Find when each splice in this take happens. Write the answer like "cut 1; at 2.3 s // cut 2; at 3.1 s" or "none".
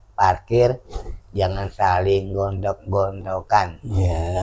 none